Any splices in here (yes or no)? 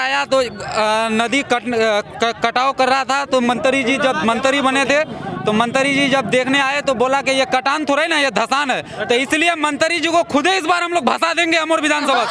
no